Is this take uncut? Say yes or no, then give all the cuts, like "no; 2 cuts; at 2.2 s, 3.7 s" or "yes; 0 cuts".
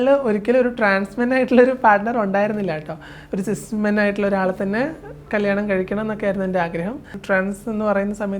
no; 1 cut; at 7.1 s